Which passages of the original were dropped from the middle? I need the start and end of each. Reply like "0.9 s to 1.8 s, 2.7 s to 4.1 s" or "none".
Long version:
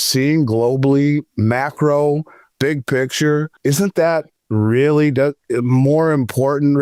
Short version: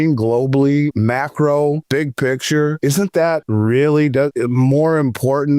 1.2 s to 1.4 s, 2.2 s to 2.5 s, 3.8 s to 4.1 s, 5.4 s to 5.5 s